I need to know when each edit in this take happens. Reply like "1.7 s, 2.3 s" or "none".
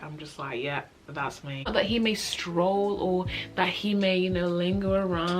1.7 s